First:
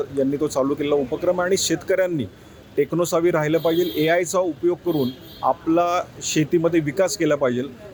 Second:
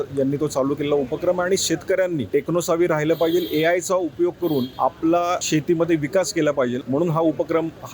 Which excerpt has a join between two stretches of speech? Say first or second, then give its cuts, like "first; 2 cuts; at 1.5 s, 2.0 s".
second; 4 cuts; at 2.2 s, 4.7 s, 5.4 s, 6.8 s